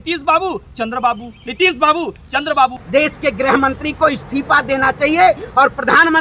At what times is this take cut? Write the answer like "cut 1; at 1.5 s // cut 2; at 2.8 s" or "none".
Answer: cut 1; at 2.8 s